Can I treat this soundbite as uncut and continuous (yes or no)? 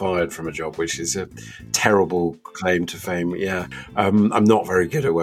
no